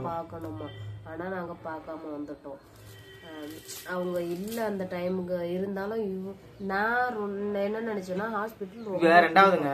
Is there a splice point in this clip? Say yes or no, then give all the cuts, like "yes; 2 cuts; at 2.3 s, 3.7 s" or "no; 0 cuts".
no; 0 cuts